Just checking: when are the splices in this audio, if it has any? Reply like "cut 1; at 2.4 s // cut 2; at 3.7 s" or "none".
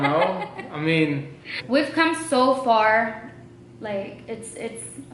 cut 1; at 1.6 s